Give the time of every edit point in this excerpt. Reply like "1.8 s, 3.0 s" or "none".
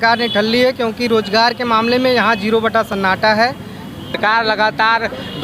4.2 s